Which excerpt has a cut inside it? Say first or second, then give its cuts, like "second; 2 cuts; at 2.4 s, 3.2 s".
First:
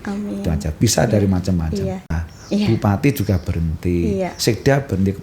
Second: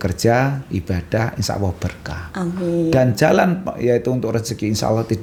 first; 1 cut; at 2.1 s